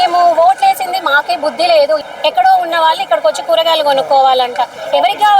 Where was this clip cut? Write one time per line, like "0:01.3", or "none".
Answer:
0:02.0